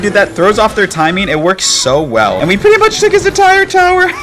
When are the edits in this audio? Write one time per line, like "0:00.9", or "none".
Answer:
0:02.4